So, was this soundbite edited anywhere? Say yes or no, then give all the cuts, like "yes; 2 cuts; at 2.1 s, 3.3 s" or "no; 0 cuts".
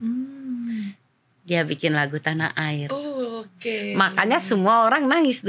no; 0 cuts